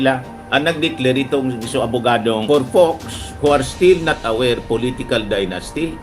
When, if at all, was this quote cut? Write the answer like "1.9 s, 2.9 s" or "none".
2.4 s